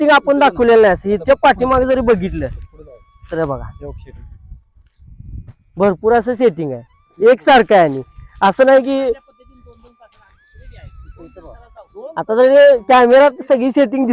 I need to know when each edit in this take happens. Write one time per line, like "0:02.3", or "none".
none